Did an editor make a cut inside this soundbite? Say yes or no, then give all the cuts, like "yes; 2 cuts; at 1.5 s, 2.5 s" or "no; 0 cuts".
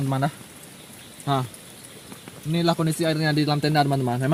no; 0 cuts